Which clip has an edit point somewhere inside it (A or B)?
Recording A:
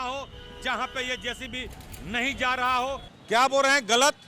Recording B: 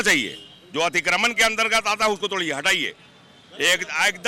A